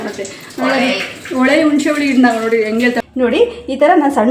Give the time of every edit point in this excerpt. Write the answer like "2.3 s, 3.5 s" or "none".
3.0 s